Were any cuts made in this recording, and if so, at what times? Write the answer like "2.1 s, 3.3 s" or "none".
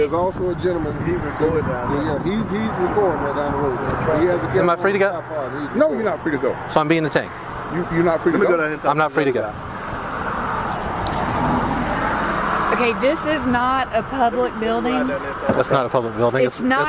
none